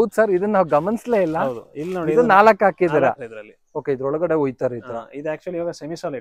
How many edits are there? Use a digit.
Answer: 1